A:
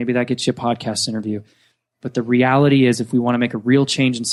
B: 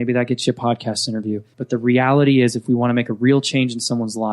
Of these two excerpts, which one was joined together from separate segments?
B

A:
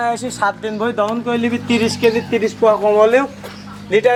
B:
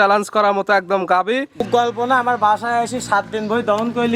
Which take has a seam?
B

